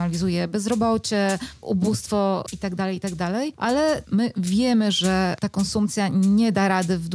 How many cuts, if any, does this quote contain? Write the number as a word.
three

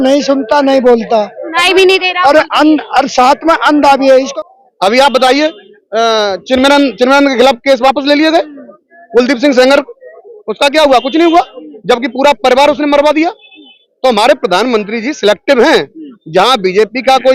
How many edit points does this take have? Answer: one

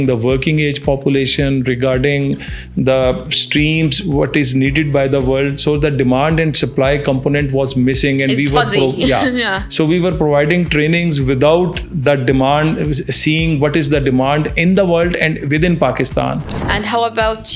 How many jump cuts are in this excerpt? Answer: one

